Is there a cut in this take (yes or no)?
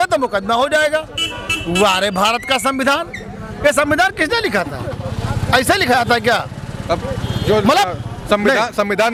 no